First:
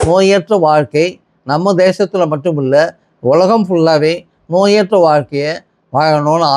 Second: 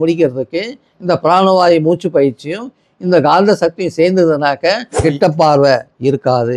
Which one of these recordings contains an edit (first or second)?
second